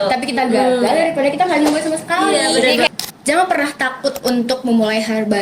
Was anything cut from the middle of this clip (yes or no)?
yes